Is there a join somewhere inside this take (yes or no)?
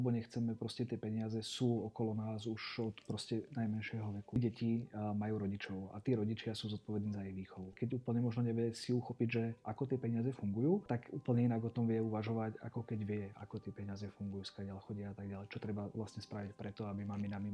yes